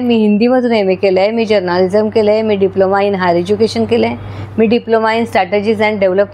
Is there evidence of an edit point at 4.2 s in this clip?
no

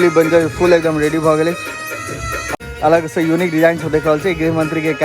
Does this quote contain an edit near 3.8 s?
no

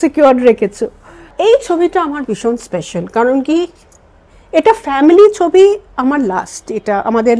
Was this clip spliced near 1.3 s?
yes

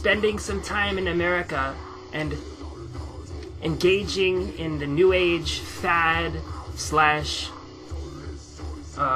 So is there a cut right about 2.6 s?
no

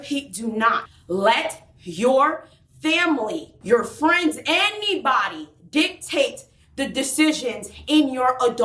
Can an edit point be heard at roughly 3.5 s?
yes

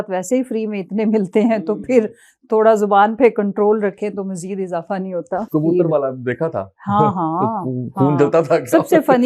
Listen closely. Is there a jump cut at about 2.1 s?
no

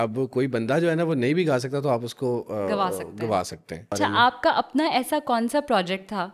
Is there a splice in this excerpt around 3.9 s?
yes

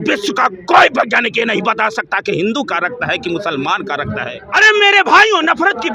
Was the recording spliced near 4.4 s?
yes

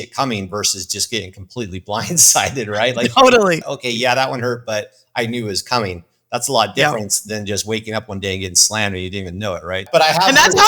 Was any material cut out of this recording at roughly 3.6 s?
yes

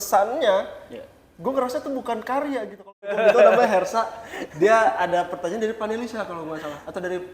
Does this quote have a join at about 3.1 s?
yes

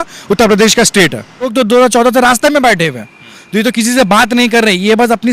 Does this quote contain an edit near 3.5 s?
no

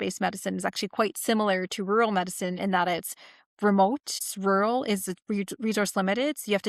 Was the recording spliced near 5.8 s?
no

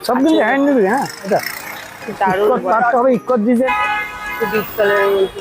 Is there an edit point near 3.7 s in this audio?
yes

